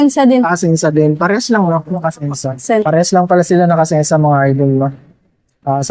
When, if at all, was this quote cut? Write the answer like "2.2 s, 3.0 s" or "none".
none